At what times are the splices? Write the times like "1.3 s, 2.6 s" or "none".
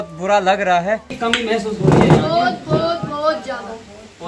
1.1 s